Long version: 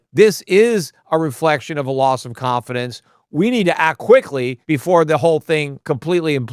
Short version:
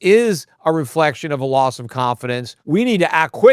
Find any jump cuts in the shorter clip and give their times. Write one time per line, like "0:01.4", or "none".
0:02.5